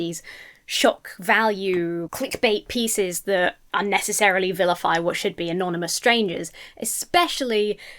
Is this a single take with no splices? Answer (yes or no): no